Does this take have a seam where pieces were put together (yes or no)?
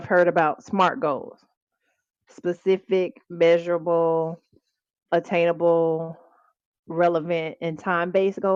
no